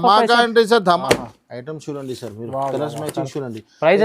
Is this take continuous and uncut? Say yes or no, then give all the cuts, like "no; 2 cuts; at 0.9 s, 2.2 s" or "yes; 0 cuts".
no; 1 cut; at 1.0 s